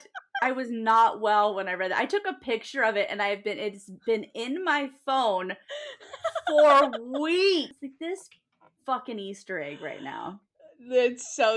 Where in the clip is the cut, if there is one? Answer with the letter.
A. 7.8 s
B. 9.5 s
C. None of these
A